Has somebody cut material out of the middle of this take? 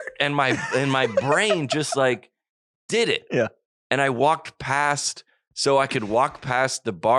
no; 0 cuts

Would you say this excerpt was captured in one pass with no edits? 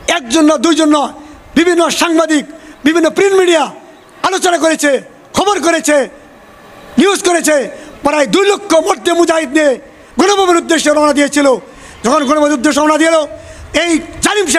yes; 0 cuts

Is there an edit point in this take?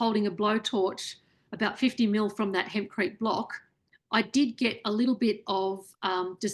no; 0 cuts

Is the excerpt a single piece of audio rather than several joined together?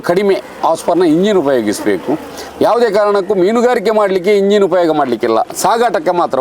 yes; 0 cuts

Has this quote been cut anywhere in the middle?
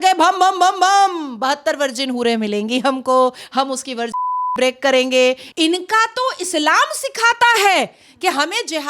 yes; 1 cut; at 5.4 s

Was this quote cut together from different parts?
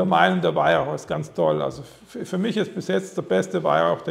no; 0 cuts

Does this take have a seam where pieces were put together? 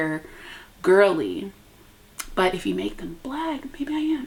no; 0 cuts

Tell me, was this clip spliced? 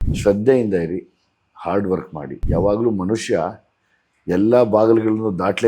yes; 1 cut; at 2.3 s

